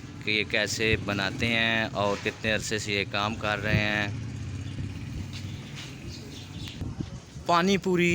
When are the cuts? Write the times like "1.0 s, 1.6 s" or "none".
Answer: 6.7 s